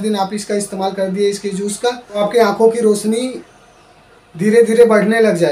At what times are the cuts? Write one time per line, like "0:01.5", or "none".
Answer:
0:02.2